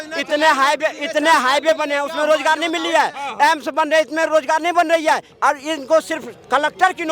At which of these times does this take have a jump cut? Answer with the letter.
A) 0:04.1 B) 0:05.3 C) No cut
B